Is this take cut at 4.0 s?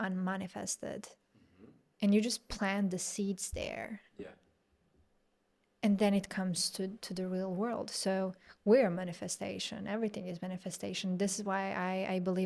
no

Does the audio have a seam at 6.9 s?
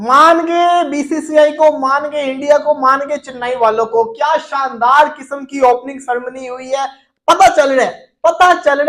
no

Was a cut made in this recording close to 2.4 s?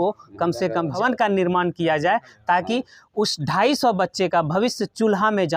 no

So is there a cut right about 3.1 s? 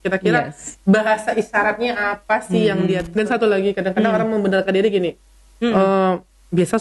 yes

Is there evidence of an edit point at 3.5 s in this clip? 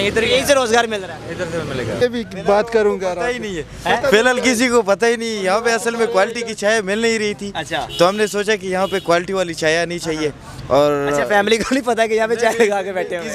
no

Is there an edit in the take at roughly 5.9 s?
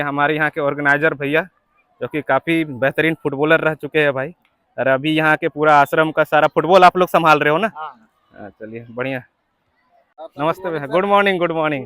no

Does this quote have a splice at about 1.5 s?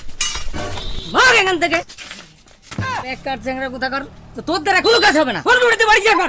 no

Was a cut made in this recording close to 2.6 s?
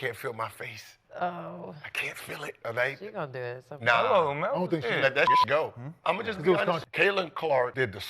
yes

